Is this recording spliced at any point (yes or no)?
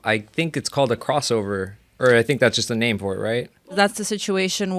yes